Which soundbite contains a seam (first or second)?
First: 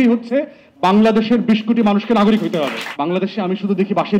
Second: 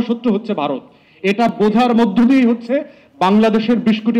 first